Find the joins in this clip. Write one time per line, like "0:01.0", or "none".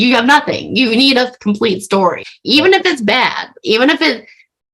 0:02.3